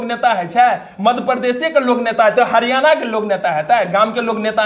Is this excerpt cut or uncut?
uncut